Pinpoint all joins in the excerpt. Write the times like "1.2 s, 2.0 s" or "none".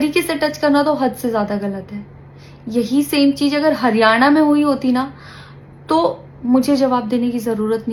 none